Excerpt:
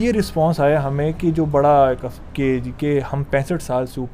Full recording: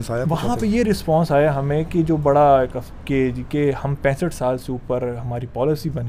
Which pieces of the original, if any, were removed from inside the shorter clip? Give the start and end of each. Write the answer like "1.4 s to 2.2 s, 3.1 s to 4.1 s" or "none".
none